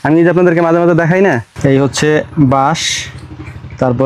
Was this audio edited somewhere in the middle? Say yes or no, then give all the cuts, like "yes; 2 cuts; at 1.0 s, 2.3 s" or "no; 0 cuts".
yes; 1 cut; at 1.5 s